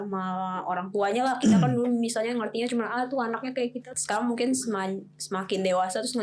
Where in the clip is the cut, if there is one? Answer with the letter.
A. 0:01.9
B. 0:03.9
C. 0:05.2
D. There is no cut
B